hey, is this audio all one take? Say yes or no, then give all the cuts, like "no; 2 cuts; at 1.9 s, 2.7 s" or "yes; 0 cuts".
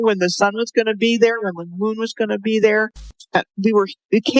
no; 1 cut; at 3.4 s